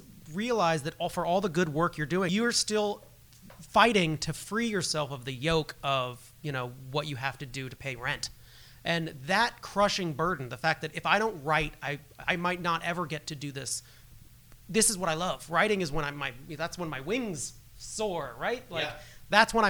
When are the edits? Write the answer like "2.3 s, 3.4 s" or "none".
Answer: 2.3 s